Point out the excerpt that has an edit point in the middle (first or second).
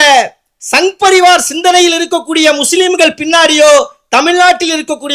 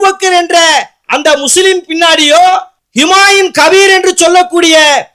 second